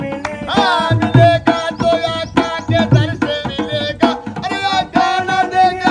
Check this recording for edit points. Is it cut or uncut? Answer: cut